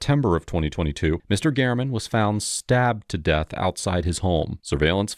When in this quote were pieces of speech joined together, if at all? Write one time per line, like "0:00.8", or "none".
none